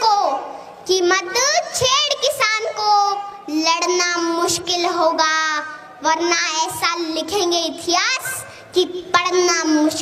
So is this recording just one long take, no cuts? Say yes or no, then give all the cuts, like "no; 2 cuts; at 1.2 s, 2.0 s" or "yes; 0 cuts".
yes; 0 cuts